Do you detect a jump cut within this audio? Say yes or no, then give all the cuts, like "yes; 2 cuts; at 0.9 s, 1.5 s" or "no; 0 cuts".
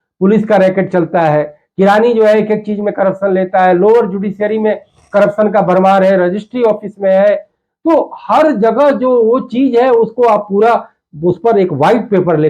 no; 0 cuts